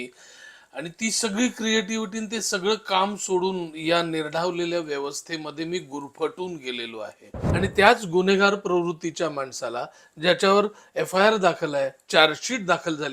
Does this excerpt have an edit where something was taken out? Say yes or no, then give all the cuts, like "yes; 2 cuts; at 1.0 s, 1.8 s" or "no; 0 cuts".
yes; 1 cut; at 7.4 s